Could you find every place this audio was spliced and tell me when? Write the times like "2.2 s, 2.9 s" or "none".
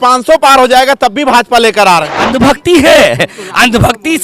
2.2 s